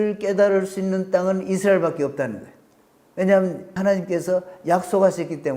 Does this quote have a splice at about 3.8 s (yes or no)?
yes